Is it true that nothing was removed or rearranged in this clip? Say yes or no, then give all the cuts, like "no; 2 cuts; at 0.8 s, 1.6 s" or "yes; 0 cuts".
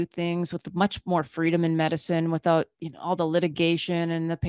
yes; 0 cuts